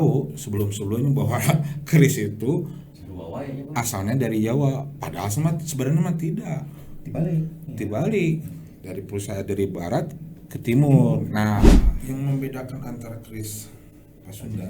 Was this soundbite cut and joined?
yes; 1 cut; at 12.0 s

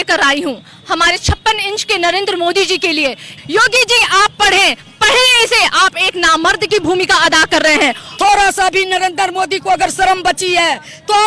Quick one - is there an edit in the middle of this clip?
yes; 2 cuts; at 3.4 s, 8.1 s

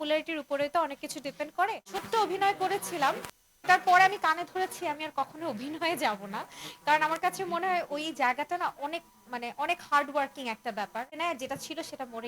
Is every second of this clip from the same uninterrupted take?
no; 2 cuts; at 1.9 s, 11.2 s

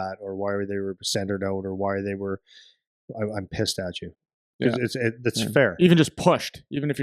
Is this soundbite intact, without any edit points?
yes; 0 cuts

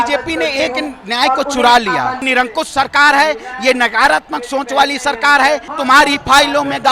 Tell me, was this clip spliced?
yes; 2 cuts; at 2.3 s, 5.8 s

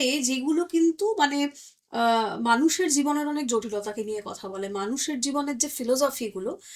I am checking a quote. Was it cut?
no; 0 cuts

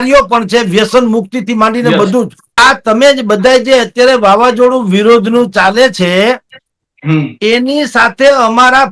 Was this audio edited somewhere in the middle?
yes; 1 cut; at 2.6 s

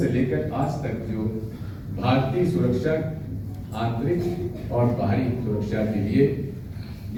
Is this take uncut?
yes; 0 cuts

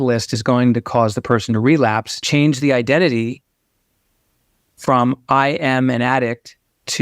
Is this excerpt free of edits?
no; 1 cut; at 2.1 s

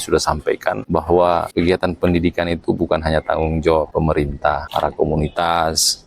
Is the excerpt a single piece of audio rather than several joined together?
no; 3 cuts; at 0.8 s, 1.5 s, 4.3 s

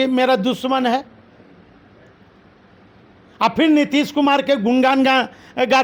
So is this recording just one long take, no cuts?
yes; 0 cuts

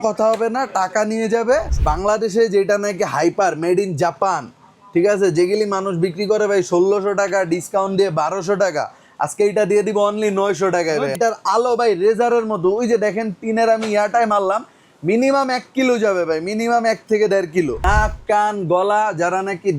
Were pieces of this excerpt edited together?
yes; 3 cuts; at 1.7 s, 11.2 s, 17.8 s

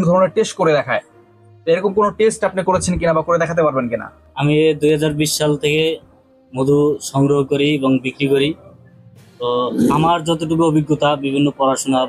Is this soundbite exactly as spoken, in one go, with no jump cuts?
no; 1 cut; at 4.2 s

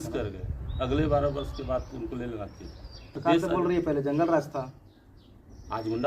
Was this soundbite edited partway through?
yes; 1 cut; at 3.2 s

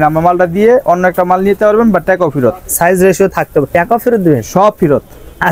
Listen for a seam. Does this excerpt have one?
no; 0 cuts

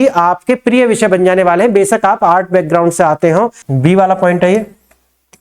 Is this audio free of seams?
no; 1 cut; at 3.6 s

